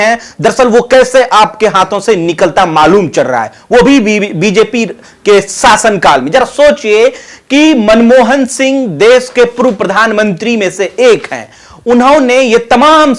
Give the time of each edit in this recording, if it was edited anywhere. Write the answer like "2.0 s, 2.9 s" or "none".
none